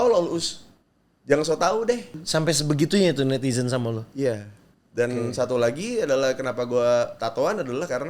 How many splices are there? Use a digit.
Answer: 1